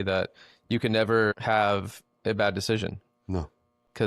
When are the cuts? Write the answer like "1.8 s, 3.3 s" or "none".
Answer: 1.4 s